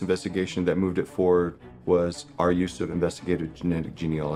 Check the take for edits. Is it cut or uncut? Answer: uncut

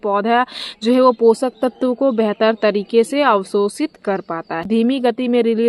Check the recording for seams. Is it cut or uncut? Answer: cut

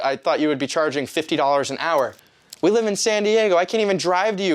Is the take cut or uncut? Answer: uncut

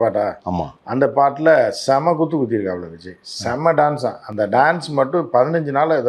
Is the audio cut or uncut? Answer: uncut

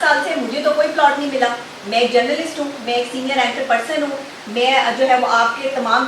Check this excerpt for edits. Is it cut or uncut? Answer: uncut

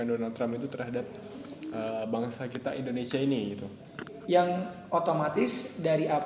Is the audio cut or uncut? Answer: uncut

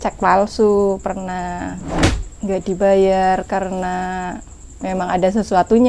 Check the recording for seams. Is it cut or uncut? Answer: cut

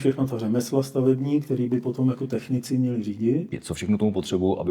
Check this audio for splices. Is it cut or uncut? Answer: cut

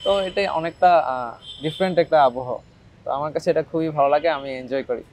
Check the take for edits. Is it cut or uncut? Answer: uncut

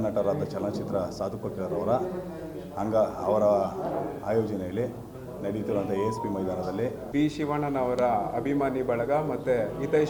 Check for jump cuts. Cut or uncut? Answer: cut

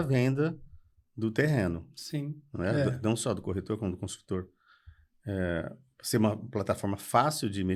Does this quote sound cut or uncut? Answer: uncut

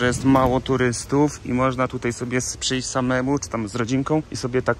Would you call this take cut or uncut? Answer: uncut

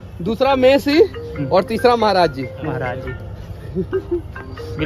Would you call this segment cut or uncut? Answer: uncut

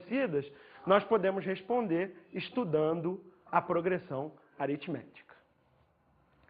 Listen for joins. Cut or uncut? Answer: cut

